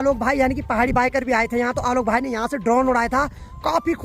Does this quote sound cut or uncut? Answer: uncut